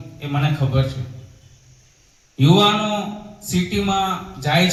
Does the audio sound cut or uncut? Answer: uncut